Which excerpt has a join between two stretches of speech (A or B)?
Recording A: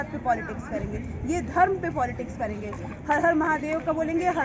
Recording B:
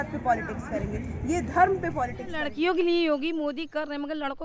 B